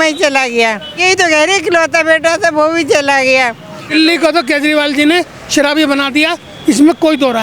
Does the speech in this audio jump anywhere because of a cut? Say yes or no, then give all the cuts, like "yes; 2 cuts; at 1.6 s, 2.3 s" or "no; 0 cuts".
yes; 2 cuts; at 1.0 s, 3.9 s